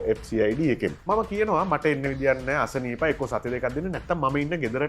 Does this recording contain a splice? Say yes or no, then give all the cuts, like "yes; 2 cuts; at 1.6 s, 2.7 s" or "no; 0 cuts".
yes; 1 cut; at 1.0 s